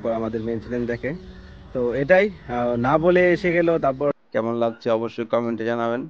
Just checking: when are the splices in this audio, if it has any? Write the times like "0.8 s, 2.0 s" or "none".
4.1 s